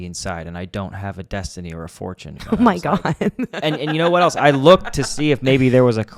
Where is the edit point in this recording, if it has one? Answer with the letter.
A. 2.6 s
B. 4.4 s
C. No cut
C